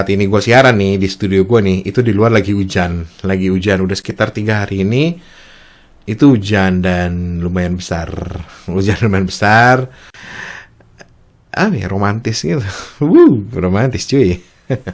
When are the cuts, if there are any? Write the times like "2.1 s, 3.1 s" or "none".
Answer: 10.1 s

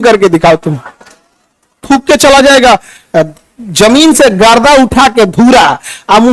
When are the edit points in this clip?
1.8 s

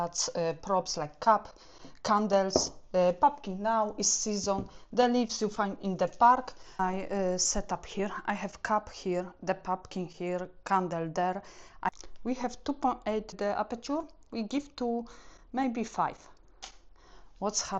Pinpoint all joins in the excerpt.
6.8 s, 11.9 s

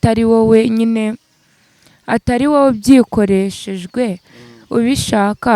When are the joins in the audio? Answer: none

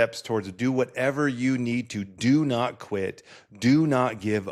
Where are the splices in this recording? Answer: none

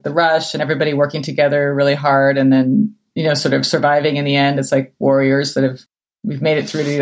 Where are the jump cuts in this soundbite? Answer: none

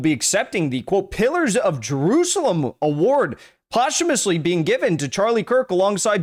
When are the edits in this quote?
none

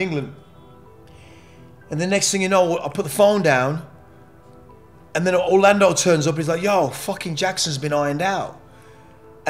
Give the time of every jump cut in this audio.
none

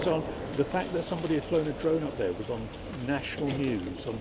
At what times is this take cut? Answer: none

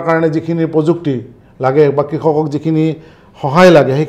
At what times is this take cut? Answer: none

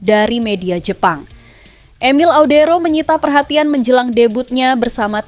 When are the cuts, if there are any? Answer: none

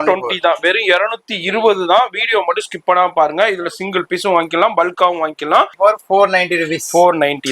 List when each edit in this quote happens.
5.7 s

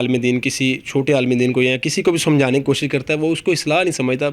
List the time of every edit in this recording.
none

